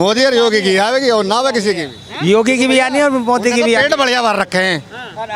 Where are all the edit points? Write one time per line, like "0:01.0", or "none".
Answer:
none